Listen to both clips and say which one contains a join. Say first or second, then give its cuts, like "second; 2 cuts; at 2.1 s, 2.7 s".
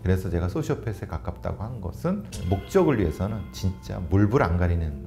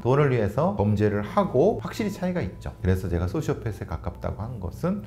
second; 2 cuts; at 0.8 s, 1.9 s